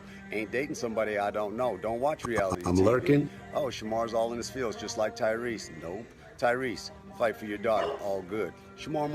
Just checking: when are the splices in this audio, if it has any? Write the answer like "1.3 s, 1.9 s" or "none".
2.6 s, 3.3 s